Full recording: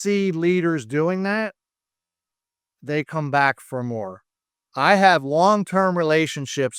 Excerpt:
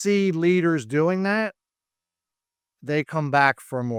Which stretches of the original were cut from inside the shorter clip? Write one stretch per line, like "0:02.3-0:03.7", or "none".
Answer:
none